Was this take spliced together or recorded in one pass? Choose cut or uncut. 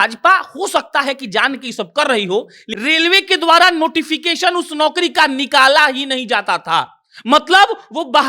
cut